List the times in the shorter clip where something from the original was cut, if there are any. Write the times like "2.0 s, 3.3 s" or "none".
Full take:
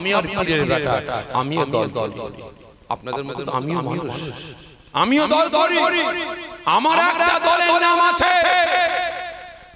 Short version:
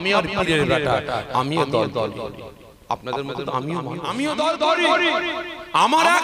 4.0 s